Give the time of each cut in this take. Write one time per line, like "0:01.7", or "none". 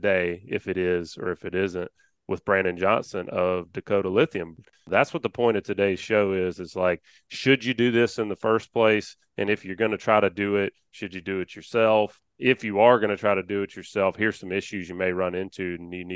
0:04.9
0:12.3